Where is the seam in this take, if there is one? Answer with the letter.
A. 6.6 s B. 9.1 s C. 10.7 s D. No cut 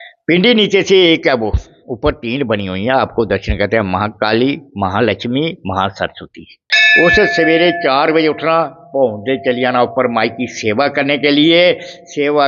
A